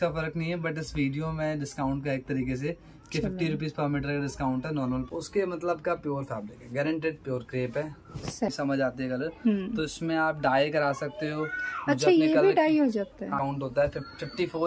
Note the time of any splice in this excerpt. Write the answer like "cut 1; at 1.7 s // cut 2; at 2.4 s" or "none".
cut 1; at 5.1 s // cut 2; at 8.5 s // cut 3; at 13.4 s